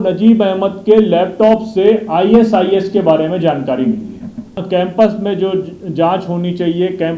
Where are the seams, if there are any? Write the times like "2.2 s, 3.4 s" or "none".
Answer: 4.6 s